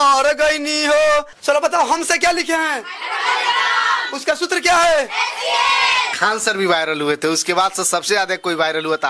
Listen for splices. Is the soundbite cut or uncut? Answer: cut